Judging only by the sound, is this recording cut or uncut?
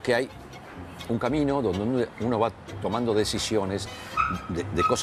uncut